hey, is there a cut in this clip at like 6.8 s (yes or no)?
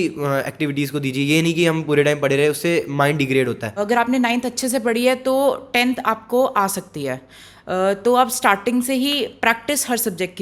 no